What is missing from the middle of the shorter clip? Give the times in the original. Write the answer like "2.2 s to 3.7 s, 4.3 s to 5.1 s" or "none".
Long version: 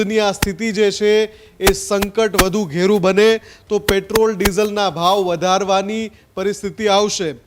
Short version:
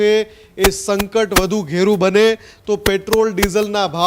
none